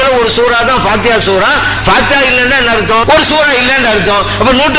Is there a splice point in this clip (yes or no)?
yes